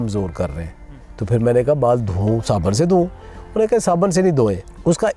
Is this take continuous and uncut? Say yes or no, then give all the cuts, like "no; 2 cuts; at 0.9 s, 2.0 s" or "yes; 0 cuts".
yes; 0 cuts